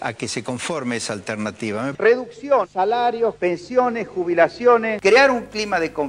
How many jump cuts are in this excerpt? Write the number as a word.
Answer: two